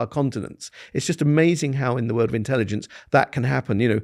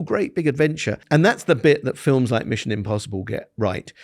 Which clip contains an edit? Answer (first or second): second